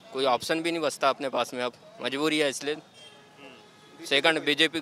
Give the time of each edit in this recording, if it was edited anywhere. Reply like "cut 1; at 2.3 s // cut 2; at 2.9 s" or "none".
none